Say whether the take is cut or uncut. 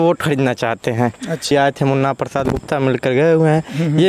cut